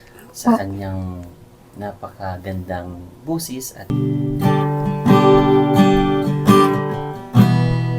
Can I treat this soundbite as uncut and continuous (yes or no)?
no